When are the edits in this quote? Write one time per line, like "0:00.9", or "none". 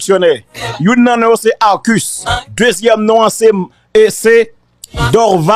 none